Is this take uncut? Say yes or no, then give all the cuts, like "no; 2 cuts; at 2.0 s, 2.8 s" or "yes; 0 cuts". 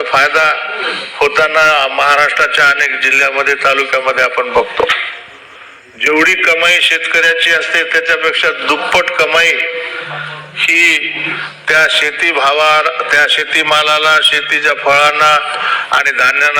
yes; 0 cuts